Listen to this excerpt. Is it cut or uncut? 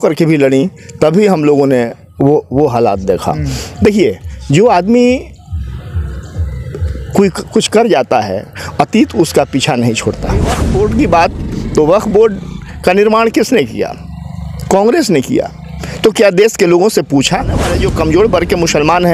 cut